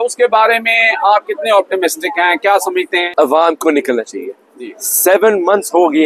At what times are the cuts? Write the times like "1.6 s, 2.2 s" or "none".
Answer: 3.1 s